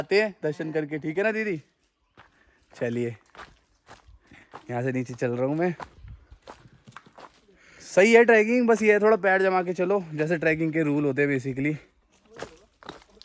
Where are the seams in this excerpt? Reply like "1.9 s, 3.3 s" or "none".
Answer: none